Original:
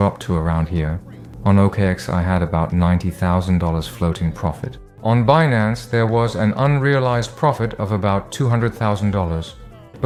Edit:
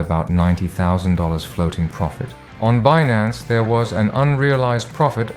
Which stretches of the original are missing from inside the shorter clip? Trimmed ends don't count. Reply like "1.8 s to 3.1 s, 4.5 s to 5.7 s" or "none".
none